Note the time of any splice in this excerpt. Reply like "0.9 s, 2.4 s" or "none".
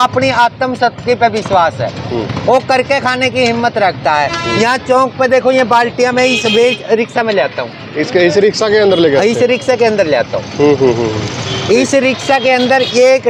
none